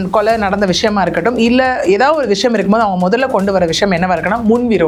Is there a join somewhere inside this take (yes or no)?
no